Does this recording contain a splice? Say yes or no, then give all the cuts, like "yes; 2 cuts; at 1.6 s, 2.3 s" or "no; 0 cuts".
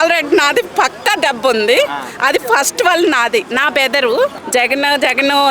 yes; 1 cut; at 4.4 s